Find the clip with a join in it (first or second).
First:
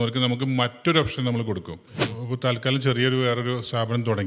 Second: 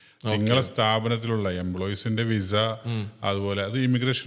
first